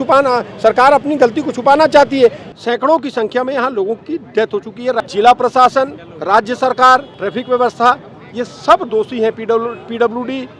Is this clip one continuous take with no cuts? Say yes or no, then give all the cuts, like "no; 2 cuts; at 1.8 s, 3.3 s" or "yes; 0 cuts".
no; 4 cuts; at 2.5 s, 5.0 s, 6.1 s, 7.1 s